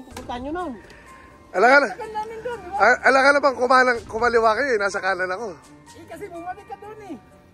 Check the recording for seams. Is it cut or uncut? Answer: uncut